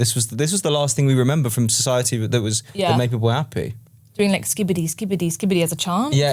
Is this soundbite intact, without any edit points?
yes; 0 cuts

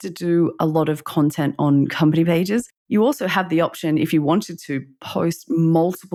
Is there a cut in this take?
no; 0 cuts

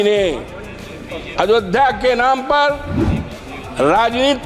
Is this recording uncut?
yes; 0 cuts

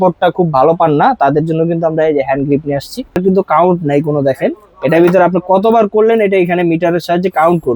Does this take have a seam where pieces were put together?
yes; 1 cut; at 3.2 s

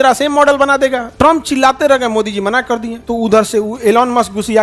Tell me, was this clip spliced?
yes; 2 cuts; at 1.0 s, 2.9 s

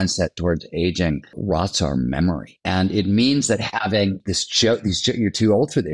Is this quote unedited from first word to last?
no; 3 cuts; at 1.4 s, 2.5 s, 4.2 s

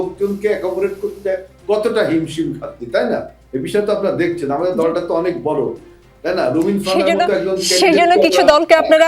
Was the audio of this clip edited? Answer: no; 0 cuts

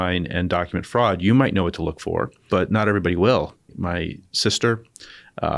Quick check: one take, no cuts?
no; 2 cuts; at 2.4 s, 3.7 s

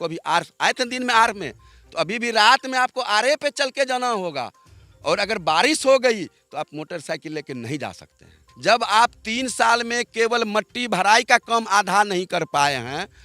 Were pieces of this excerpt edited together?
yes; 1 cut; at 8.4 s

